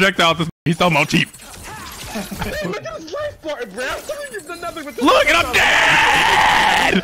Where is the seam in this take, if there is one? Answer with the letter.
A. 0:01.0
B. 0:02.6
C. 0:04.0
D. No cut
D